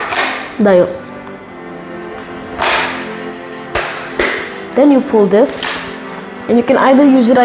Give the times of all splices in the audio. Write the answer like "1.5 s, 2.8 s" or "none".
none